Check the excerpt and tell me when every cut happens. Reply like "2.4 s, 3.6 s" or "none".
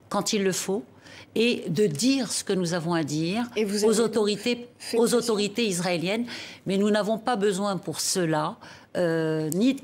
none